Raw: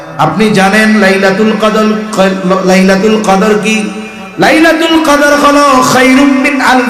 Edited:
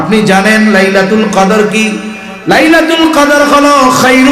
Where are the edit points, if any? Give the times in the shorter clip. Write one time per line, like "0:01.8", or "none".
0:01.3